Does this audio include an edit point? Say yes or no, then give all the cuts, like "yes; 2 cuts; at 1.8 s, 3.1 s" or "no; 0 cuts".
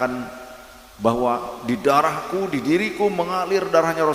no; 0 cuts